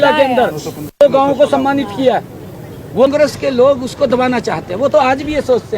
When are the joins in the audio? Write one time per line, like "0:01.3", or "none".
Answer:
0:03.1